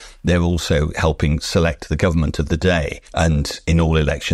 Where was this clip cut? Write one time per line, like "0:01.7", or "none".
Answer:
0:03.4